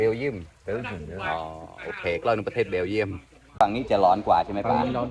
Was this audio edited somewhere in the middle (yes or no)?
yes